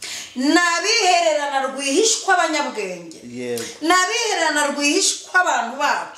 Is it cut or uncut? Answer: uncut